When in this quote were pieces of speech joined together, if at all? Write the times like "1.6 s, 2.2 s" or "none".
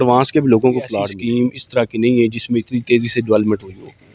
1.1 s